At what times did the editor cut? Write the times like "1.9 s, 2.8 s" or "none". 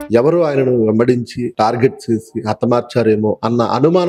1.4 s